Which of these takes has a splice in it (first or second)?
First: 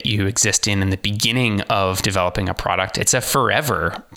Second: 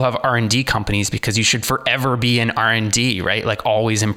first